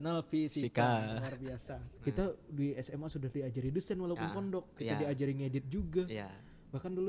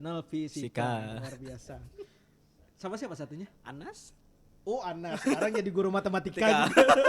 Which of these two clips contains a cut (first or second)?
first